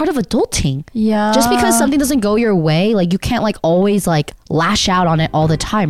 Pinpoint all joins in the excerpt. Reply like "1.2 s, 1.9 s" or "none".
none